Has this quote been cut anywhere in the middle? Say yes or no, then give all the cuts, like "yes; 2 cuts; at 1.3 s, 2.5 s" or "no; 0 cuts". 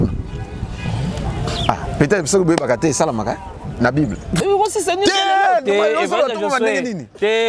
yes; 1 cut; at 4.4 s